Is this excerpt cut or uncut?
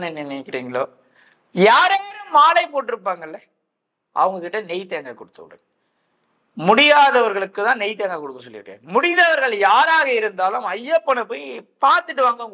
uncut